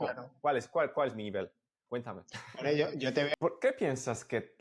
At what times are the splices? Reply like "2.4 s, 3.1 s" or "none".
3.3 s